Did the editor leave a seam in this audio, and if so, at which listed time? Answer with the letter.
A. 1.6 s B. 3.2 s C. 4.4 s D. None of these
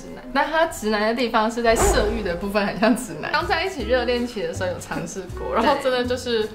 B